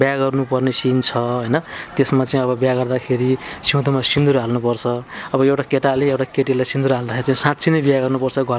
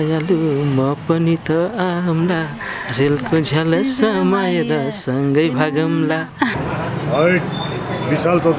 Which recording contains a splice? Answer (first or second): second